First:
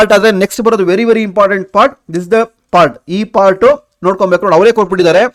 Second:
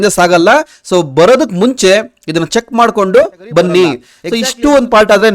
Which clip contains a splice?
second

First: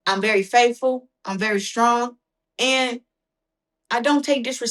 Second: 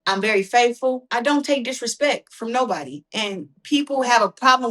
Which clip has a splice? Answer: second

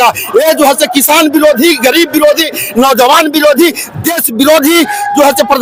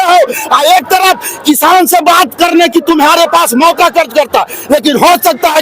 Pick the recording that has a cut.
second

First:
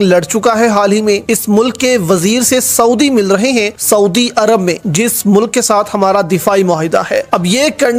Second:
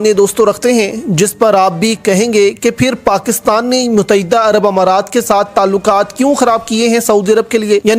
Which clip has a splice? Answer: second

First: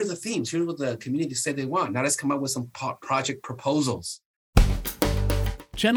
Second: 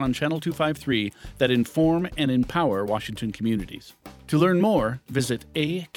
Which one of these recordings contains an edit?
first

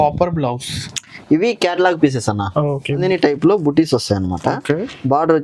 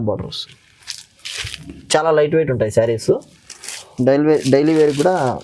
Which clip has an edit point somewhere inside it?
first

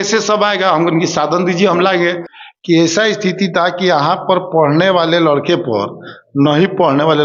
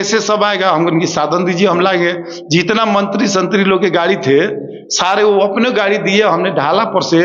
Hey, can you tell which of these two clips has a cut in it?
first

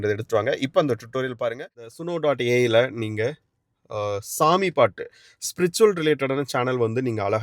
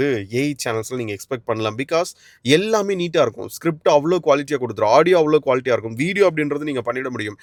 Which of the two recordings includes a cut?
first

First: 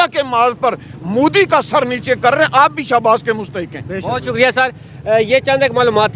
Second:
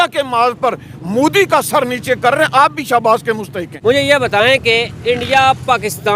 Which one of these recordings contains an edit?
second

